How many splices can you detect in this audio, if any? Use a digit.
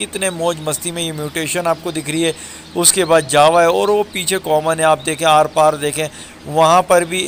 0